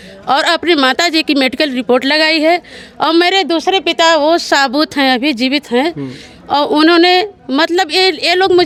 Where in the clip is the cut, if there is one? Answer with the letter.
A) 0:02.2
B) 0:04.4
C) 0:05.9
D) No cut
D